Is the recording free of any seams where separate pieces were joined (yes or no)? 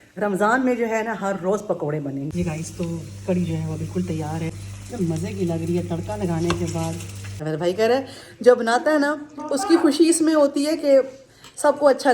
no